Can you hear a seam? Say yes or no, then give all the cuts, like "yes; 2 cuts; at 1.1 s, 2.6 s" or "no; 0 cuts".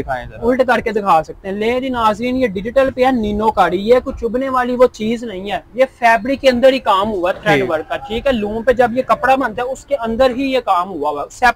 no; 0 cuts